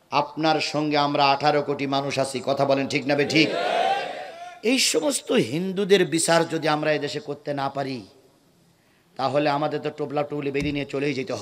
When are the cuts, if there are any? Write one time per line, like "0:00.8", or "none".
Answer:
none